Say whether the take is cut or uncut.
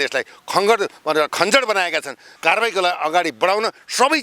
cut